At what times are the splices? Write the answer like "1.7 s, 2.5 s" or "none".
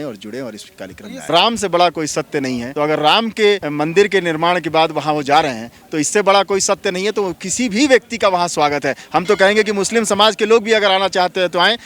1.3 s, 2.7 s, 3.7 s